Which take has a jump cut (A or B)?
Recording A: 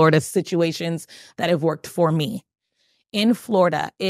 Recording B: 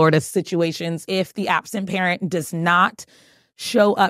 B